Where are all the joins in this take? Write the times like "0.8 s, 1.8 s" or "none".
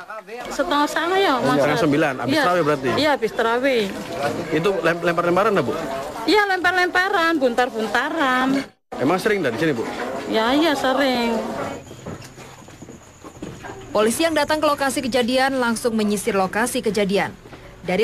12.0 s

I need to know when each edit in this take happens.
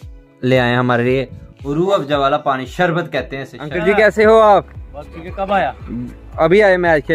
3.7 s

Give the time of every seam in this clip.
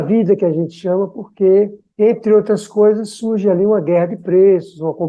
none

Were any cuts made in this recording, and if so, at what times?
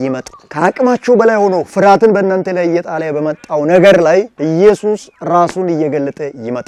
none

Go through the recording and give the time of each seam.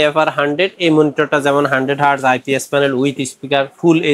none

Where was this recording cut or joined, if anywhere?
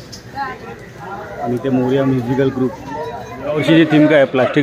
3.4 s

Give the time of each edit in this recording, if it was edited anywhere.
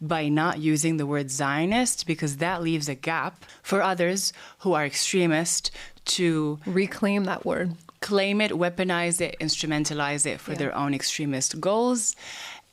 3.5 s

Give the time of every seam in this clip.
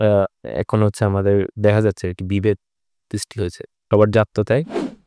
3.9 s

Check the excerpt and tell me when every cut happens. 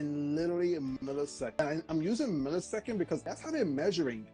3.3 s

